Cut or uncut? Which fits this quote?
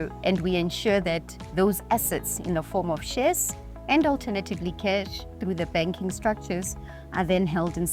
uncut